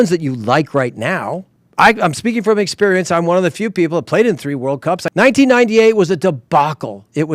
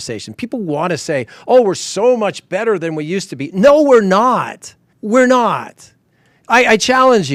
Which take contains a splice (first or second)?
first